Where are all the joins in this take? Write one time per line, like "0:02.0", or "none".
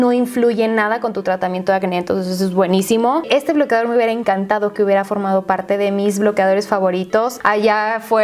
0:03.2
0:07.4